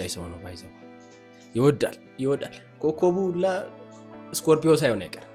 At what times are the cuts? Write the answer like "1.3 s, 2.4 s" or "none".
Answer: none